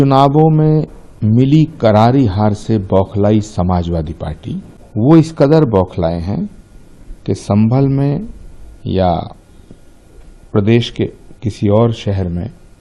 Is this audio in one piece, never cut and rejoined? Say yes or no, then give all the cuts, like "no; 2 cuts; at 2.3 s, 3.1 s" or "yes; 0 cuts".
no; 1 cut; at 4.8 s